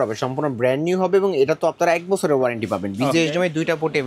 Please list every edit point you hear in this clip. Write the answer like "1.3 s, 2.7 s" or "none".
none

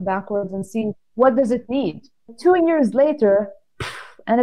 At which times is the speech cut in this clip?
2.3 s

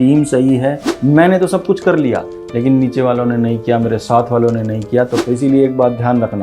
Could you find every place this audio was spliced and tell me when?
0.9 s, 5.2 s

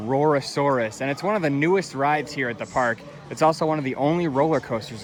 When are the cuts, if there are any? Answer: none

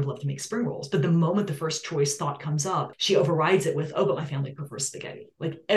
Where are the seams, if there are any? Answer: 3.0 s

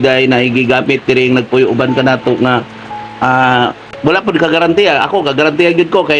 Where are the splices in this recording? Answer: 3.9 s

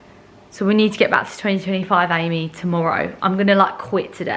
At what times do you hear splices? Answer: none

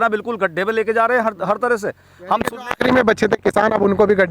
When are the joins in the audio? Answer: none

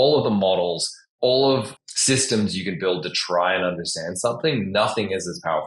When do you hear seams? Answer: 1.7 s

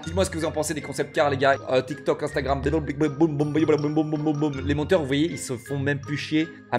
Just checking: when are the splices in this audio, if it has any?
1.6 s

